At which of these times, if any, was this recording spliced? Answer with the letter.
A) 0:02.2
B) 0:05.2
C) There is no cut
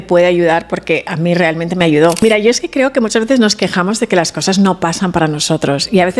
A